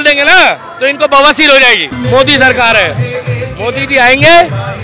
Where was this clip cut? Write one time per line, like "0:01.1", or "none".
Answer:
0:01.9